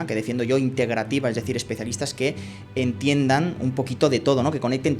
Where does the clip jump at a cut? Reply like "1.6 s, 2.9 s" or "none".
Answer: none